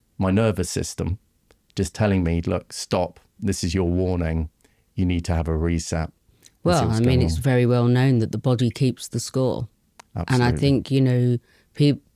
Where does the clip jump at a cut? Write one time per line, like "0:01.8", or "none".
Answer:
none